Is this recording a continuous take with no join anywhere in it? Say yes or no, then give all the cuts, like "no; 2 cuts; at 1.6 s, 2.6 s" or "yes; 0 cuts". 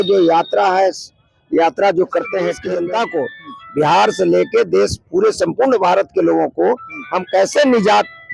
no; 1 cut; at 2.7 s